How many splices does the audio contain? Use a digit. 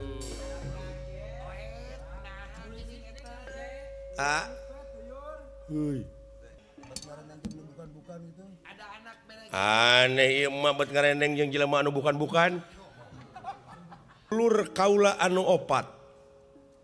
2